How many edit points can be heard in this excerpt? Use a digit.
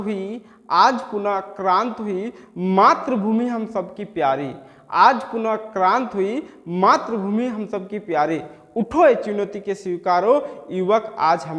0